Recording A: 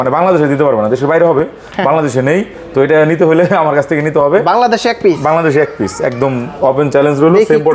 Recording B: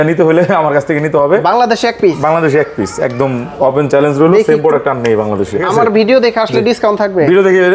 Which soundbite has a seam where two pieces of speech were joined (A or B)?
B